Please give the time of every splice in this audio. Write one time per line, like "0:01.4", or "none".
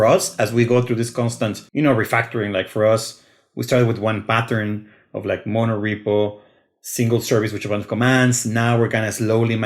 0:01.6